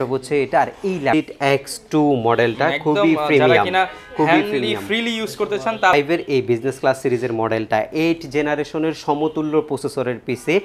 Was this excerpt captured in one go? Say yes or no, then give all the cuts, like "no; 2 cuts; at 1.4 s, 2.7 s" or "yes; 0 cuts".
no; 2 cuts; at 1.1 s, 5.9 s